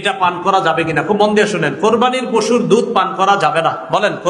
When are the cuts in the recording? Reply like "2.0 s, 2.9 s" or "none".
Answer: none